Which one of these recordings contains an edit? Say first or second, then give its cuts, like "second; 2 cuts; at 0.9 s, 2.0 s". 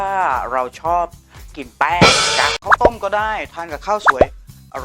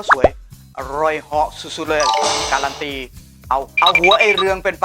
first; 1 cut; at 2.6 s